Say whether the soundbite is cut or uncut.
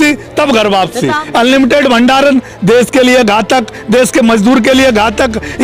cut